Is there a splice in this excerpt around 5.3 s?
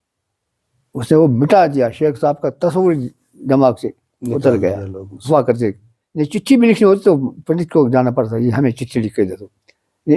yes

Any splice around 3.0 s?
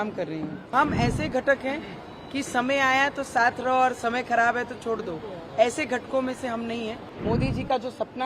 no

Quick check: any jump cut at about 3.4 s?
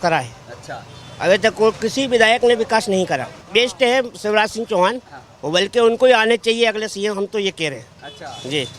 yes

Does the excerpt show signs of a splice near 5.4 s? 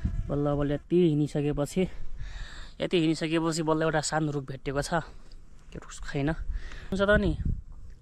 no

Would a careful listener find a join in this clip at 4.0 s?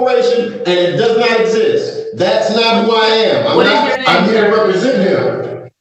yes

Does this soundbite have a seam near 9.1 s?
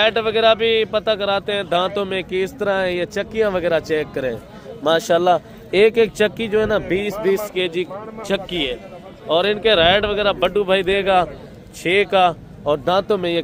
no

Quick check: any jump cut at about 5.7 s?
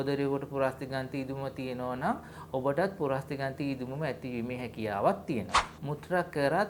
yes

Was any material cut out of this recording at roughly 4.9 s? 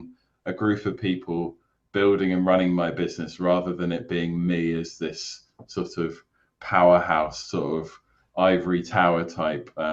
no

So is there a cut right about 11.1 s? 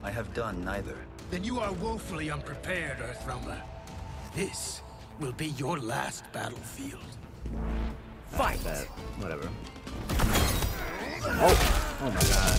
no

